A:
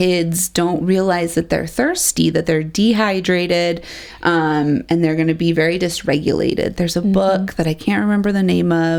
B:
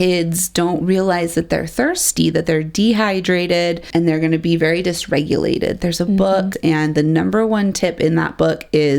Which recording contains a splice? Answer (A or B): B